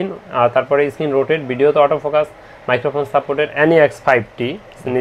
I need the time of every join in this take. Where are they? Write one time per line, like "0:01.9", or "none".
0:03.5